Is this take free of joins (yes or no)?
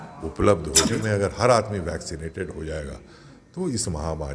no